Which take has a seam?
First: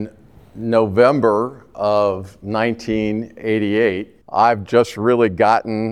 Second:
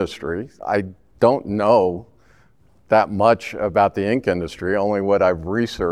first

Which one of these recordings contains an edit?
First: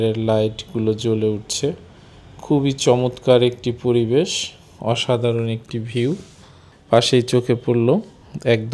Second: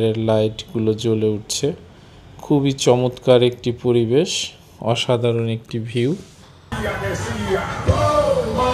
second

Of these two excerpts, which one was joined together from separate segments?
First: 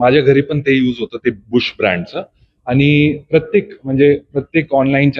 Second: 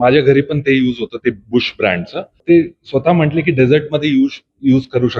second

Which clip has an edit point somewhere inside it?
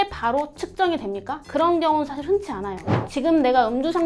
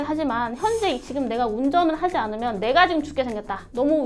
first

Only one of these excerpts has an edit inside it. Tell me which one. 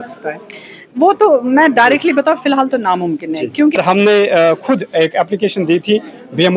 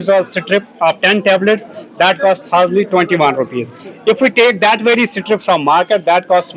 first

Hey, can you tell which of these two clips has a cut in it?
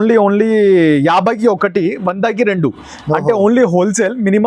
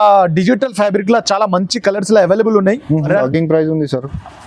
second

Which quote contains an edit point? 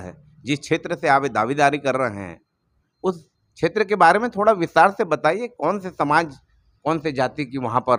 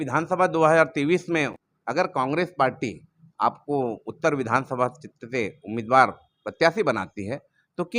second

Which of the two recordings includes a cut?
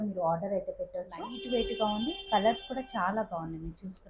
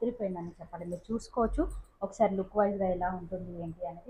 first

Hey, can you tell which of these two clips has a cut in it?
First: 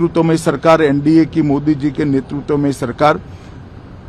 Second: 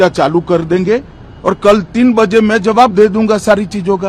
second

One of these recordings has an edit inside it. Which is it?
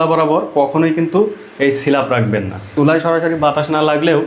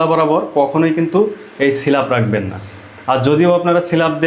first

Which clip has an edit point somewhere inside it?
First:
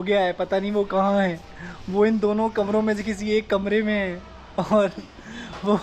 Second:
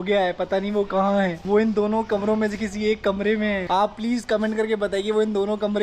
second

